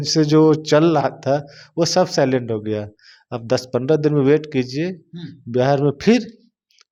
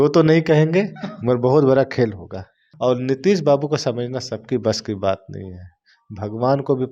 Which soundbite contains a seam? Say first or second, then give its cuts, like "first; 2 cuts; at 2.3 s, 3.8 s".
second; 1 cut; at 2.6 s